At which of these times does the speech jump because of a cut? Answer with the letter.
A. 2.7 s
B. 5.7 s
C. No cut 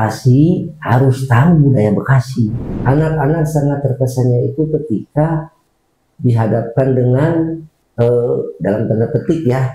A